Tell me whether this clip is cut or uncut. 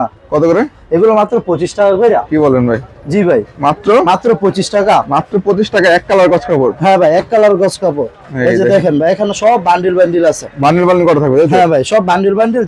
uncut